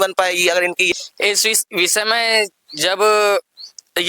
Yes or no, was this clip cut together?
yes